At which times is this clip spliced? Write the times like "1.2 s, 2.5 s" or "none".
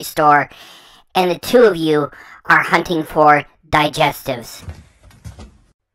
4.6 s